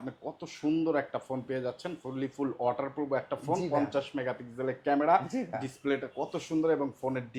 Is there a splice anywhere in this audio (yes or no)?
no